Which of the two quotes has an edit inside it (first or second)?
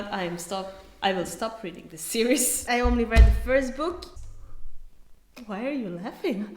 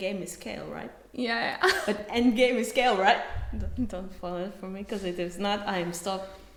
first